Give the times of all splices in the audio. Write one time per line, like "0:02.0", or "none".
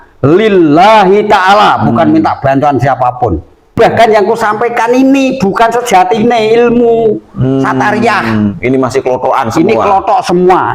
0:03.7